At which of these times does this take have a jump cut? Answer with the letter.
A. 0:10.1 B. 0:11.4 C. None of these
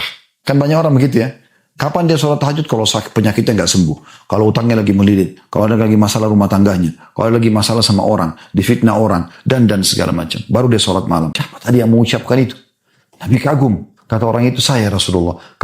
B